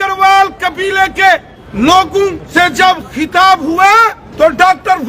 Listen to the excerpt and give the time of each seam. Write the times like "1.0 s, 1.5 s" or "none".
1.6 s, 2.4 s, 4.2 s